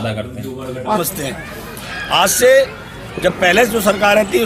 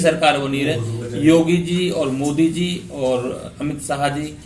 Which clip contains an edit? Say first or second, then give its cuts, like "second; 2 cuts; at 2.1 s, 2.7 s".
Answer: first; 1 cut; at 1.0 s